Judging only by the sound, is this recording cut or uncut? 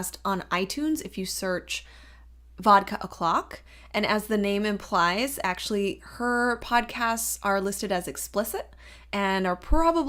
uncut